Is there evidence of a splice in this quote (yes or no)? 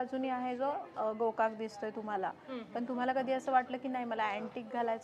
no